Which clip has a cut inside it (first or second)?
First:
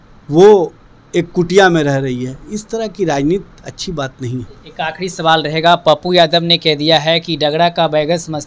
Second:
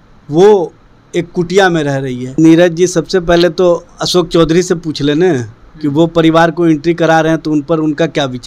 second